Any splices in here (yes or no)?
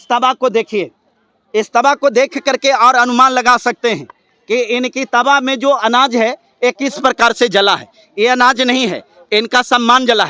no